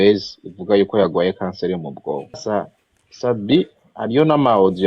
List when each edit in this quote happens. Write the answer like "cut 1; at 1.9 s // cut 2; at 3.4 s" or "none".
cut 1; at 2.5 s